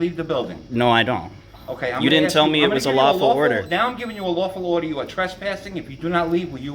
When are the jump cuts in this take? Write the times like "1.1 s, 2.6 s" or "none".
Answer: none

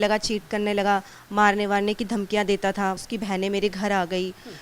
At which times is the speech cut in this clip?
1.2 s, 3.0 s

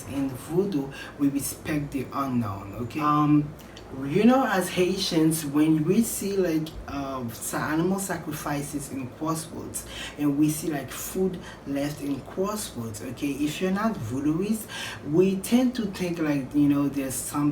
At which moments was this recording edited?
3.1 s

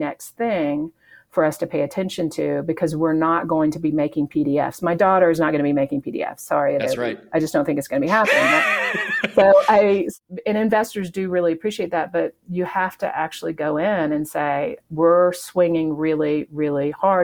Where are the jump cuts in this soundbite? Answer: 10.1 s

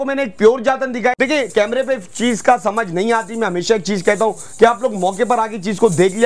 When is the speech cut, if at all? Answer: 1.2 s

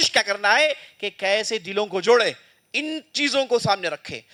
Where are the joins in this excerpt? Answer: none

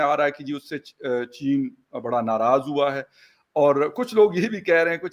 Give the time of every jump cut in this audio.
none

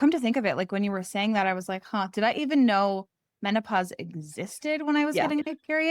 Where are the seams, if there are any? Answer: none

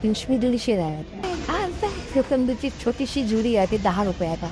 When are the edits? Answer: 1.1 s

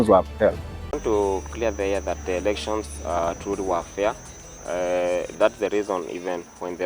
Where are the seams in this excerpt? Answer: 1.0 s

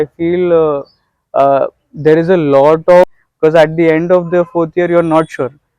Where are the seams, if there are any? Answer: 3.2 s

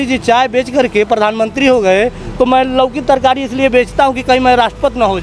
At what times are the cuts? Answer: none

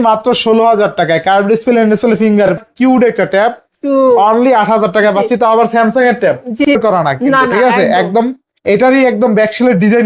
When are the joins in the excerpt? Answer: 2.5 s, 6.8 s

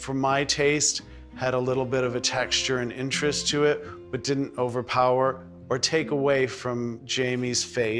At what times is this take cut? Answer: 7.0 s

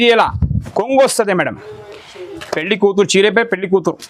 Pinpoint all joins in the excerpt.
2.2 s

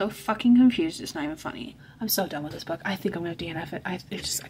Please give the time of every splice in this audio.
1.7 s

